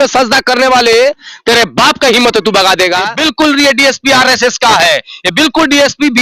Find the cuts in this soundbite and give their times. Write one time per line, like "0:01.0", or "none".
0:03.1

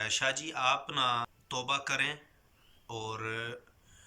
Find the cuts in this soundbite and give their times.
0:01.4

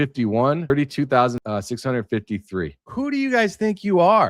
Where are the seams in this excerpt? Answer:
0:00.7
0:01.4
0:02.9

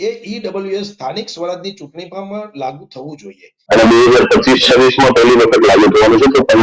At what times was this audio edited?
0:03.5

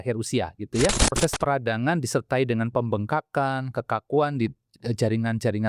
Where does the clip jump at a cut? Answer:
0:01.2

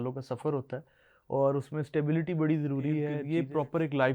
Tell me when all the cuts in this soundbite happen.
0:03.2

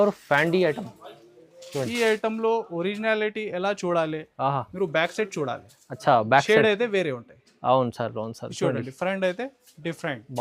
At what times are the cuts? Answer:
none

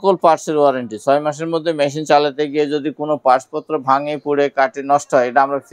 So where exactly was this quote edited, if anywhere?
none

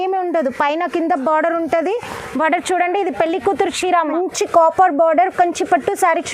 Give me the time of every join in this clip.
0:04.1

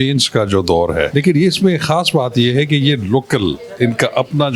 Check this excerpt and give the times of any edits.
0:01.1

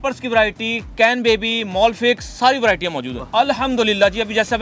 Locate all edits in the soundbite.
0:03.2

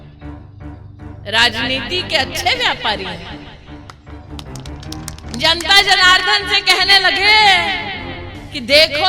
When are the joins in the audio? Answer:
0:01.1
0:03.3
0:05.0

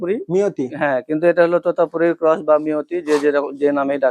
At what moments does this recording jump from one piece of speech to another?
none

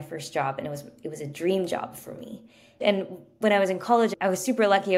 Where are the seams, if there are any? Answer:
0:02.8
0:04.1

